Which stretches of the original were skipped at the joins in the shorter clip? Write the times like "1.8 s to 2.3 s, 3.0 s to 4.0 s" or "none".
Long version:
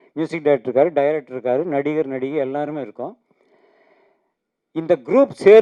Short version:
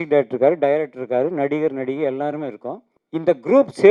3.3 s to 4.5 s